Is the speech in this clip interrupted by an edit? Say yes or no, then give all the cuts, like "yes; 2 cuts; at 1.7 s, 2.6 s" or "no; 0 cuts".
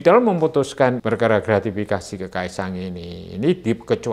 yes; 1 cut; at 1.0 s